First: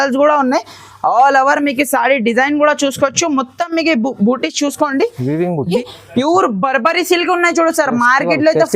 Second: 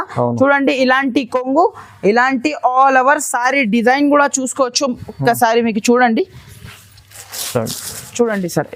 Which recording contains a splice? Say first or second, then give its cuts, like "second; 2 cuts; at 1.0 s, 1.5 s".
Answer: first; 1 cut; at 5.8 s